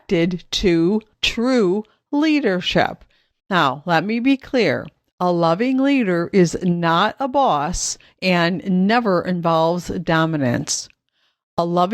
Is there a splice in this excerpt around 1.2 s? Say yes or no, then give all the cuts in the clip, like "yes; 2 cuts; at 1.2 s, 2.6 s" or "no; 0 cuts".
yes; 1 cut; at 1.2 s